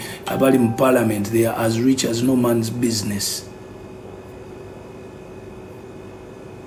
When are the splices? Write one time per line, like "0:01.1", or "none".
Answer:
none